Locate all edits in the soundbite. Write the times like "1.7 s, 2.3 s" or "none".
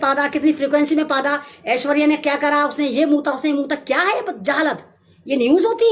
none